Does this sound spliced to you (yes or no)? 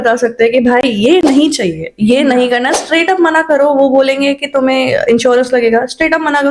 no